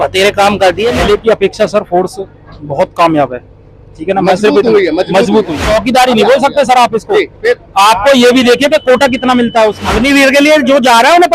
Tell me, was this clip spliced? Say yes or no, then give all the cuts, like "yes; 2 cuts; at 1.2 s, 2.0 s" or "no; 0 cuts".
yes; 3 cuts; at 1.0 s, 5.6 s, 9.9 s